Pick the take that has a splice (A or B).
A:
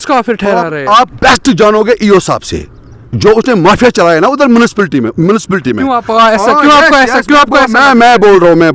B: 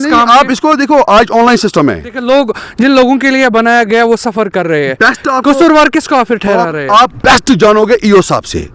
B